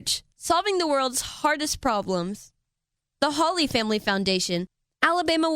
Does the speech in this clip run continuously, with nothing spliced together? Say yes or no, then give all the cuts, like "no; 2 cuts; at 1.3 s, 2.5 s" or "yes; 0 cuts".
no; 1 cut; at 4.6 s